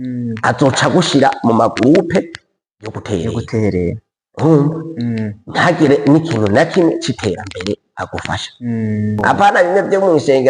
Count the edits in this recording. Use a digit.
1